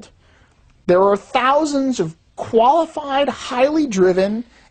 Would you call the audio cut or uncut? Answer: cut